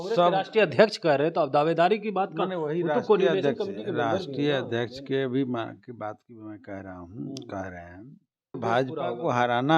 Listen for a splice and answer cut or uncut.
cut